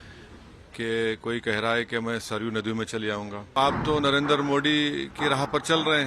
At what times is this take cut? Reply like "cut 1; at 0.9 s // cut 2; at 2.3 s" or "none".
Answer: cut 1; at 3.6 s